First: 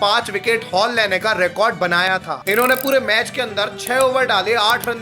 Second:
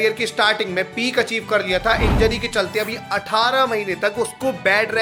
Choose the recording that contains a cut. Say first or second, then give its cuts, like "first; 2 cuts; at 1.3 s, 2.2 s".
first; 1 cut; at 2.3 s